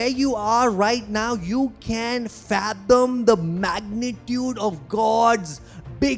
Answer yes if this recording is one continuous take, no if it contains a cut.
yes